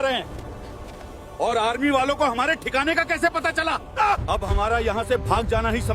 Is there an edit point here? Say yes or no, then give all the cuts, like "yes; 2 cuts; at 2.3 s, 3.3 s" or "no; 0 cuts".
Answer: yes; 1 cut; at 4.2 s